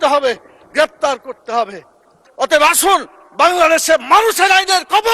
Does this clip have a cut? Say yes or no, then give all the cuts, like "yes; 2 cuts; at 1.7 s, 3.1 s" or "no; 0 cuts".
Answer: yes; 1 cut; at 2.2 s